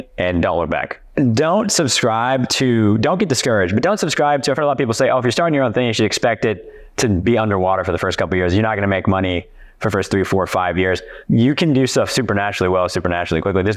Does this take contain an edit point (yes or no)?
yes